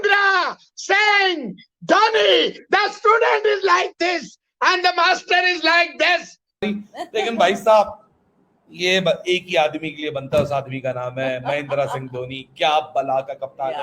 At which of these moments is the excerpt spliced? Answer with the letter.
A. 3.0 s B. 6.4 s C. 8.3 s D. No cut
B